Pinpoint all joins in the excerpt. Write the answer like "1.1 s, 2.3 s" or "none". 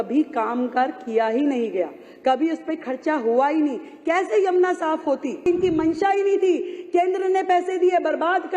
5.5 s